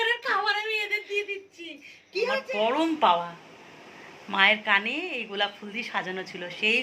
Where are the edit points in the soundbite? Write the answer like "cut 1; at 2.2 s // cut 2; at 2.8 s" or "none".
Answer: cut 1; at 2.3 s